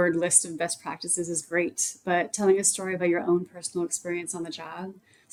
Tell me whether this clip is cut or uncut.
uncut